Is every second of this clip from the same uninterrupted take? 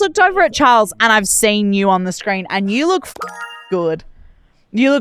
yes; 0 cuts

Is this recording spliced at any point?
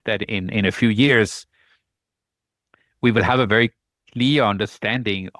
no; 0 cuts

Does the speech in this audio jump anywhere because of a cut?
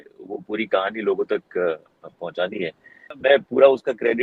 yes; 1 cut; at 3.2 s

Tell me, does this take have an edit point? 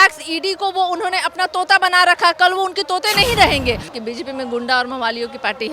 yes; 1 cut; at 3.9 s

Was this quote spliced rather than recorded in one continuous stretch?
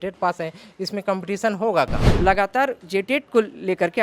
yes; 1 cut; at 2.0 s

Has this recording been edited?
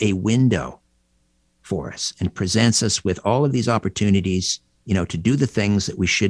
no; 0 cuts

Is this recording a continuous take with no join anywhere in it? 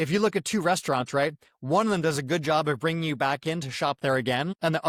yes; 0 cuts

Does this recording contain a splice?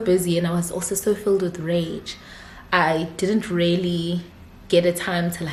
no; 0 cuts

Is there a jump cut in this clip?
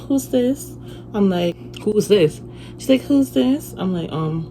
yes; 1 cut; at 1.6 s

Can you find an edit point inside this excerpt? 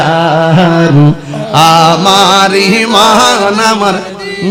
no; 0 cuts

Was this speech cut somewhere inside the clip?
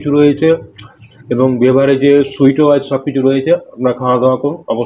no; 0 cuts

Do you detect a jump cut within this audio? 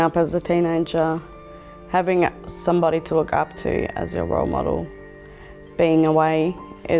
no; 0 cuts

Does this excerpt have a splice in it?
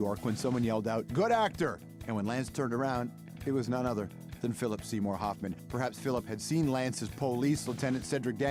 no; 0 cuts

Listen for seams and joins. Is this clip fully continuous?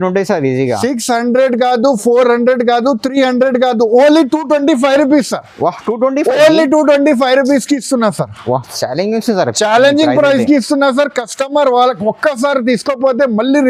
yes; 0 cuts

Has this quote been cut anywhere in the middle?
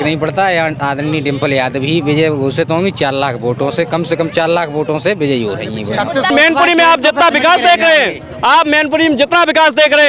yes; 1 cut; at 6.3 s

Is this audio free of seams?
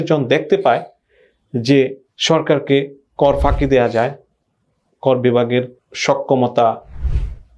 yes; 0 cuts

